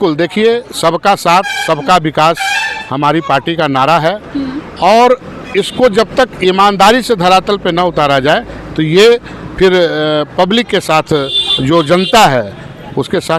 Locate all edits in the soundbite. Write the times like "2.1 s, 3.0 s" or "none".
none

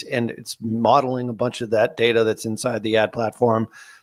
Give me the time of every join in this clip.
none

